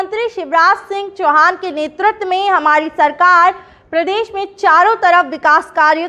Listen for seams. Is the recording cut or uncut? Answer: uncut